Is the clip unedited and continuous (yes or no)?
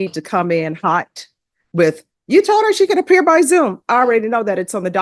yes